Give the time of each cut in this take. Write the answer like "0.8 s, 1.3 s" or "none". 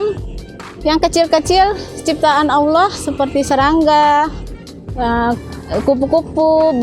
none